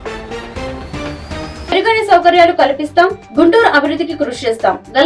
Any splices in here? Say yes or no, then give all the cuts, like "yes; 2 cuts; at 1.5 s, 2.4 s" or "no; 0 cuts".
yes; 1 cut; at 1.7 s